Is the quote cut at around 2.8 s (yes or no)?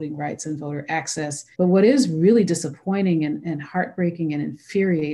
no